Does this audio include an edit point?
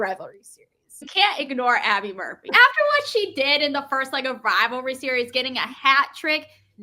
yes; 2 cuts; at 1.1 s, 2.5 s

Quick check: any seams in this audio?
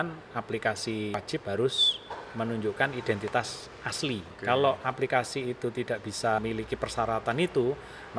yes; 3 cuts; at 1.2 s, 4.3 s, 6.4 s

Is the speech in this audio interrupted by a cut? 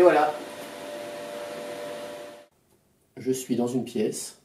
yes; 1 cut; at 2.7 s

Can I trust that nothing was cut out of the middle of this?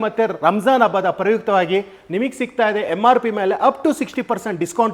yes; 0 cuts

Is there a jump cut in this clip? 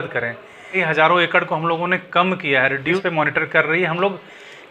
yes; 2 cuts; at 0.8 s, 3.0 s

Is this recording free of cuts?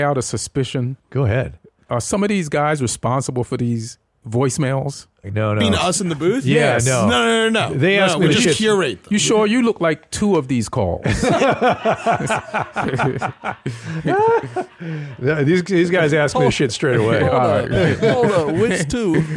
no; 2 cuts; at 1.4 s, 5.3 s

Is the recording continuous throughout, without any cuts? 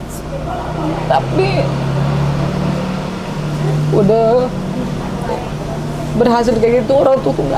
yes; 0 cuts

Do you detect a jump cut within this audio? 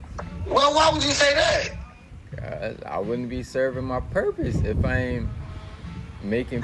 no; 0 cuts

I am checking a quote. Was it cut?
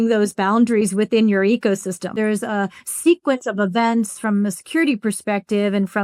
yes; 1 cut; at 2.2 s

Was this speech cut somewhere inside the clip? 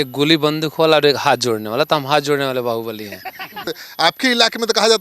yes; 1 cut; at 3.7 s

